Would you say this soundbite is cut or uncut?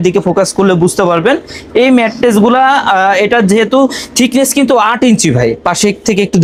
uncut